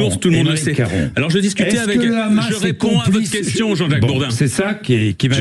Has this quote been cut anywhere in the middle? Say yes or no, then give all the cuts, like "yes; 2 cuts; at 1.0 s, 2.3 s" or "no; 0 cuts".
no; 0 cuts